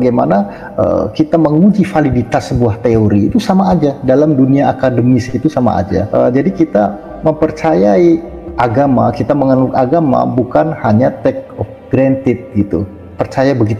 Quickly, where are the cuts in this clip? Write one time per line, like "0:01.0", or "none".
0:06.1